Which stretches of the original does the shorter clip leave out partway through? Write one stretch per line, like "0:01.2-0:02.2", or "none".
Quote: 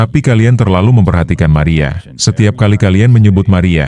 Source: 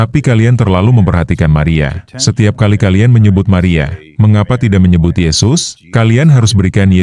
none